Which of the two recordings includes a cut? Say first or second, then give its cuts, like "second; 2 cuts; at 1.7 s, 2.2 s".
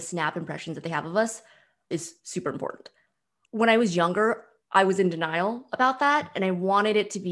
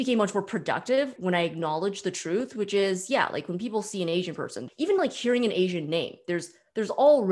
second; 1 cut; at 4.6 s